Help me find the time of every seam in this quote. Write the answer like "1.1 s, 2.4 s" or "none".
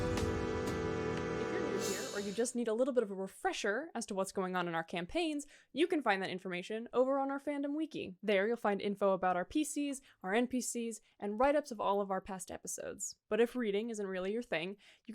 1.9 s